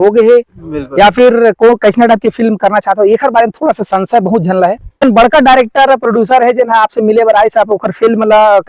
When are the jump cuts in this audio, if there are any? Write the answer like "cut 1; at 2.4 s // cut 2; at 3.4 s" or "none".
cut 1; at 5.0 s